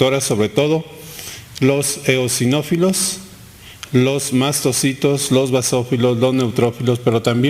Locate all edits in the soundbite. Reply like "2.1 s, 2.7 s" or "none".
4.7 s